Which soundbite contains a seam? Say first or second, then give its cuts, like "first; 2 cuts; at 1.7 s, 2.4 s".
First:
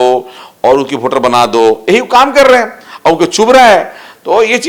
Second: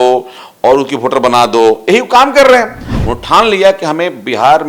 second; 1 cut; at 2.8 s